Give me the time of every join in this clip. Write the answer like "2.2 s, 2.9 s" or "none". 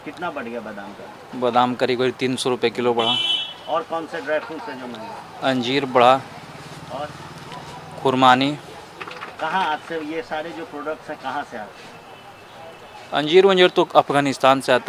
none